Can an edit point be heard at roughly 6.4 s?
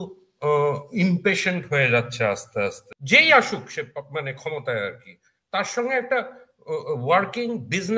no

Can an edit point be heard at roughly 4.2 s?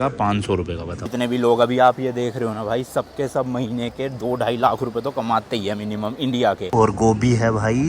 no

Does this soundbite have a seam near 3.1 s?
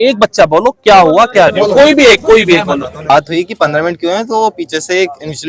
yes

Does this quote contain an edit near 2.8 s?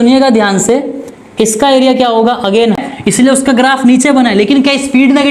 yes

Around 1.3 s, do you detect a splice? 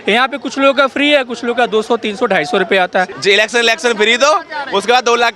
no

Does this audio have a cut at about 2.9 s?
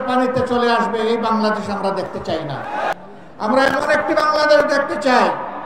yes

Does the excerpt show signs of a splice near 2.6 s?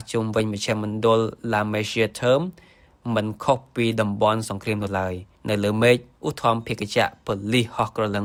no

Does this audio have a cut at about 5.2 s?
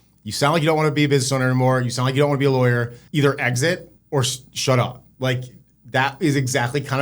no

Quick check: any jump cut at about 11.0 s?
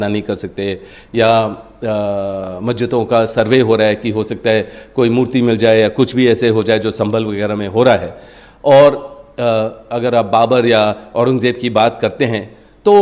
no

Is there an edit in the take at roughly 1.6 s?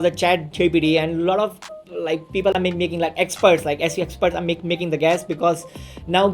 no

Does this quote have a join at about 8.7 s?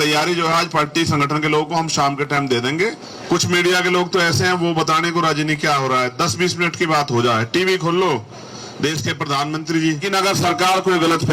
no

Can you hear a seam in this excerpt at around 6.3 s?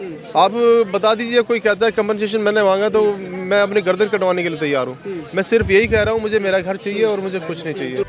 no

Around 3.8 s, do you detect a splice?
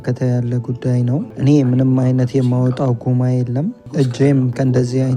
yes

